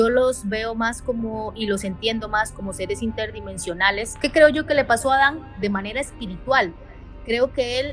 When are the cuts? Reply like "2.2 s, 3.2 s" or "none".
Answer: 4.1 s